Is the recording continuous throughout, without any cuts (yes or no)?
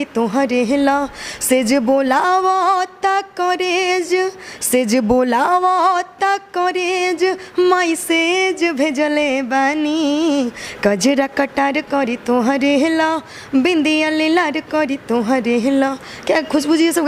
yes